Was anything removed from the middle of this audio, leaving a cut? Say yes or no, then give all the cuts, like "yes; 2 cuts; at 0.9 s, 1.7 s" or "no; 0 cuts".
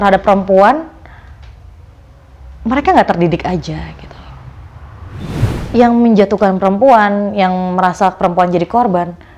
yes; 1 cut; at 5.4 s